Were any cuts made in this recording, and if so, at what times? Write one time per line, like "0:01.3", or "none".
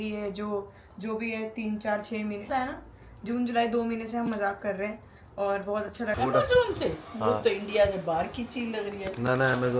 0:02.5
0:06.2